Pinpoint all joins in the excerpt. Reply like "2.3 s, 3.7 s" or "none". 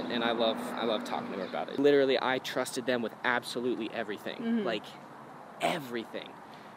1.7 s

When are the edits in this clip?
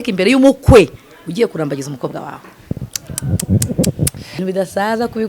4.3 s

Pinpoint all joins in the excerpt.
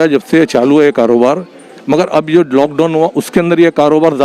none

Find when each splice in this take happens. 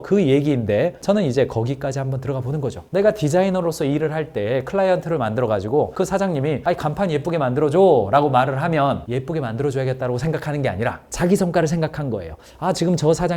none

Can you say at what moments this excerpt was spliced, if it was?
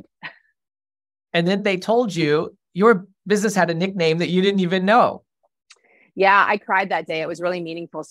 none

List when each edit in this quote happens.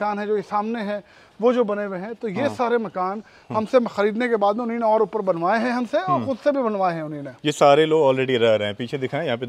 none

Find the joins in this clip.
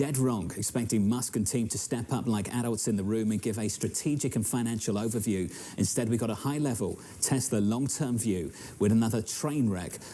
none

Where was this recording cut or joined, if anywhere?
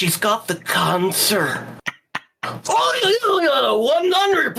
none

